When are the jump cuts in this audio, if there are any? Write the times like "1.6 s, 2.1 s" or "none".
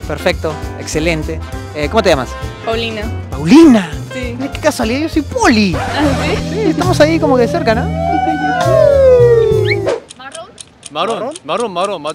9.9 s